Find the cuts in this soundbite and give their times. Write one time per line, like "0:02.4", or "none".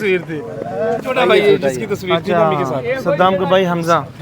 0:01.1